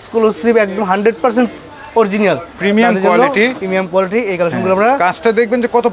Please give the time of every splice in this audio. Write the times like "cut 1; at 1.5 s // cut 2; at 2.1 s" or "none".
none